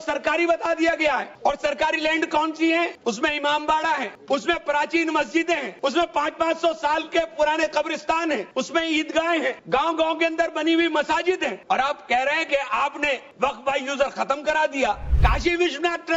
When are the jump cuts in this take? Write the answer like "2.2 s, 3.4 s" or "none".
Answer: 1.3 s, 2.9 s, 4.1 s, 5.7 s, 8.5 s, 9.6 s, 11.6 s, 13.3 s, 15.1 s